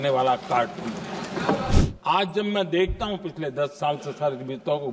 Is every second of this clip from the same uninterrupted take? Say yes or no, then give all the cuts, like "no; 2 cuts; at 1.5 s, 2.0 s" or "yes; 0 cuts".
no; 1 cut; at 1.8 s